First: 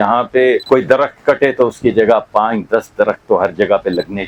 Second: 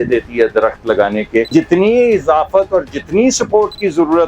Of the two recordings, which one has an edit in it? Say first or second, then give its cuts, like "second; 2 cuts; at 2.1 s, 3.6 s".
second; 1 cut; at 1.5 s